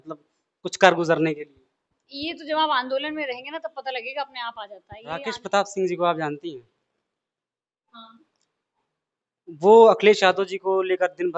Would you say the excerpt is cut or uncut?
cut